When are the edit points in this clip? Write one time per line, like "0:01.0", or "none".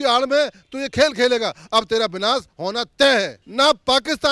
0:03.4